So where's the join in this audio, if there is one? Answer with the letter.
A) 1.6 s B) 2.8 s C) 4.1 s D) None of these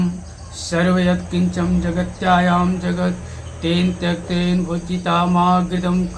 D